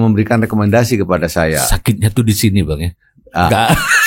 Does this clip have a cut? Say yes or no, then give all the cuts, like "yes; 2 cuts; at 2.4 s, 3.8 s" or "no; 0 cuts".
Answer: no; 0 cuts